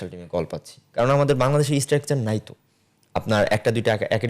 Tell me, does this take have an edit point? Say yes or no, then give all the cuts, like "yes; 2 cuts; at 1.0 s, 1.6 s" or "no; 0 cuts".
no; 0 cuts